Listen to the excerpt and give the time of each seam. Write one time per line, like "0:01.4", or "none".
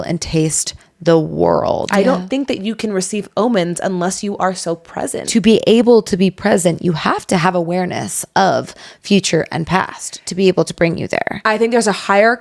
0:01.8
0:05.2